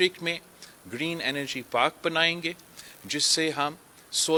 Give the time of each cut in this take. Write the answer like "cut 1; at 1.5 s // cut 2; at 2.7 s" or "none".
none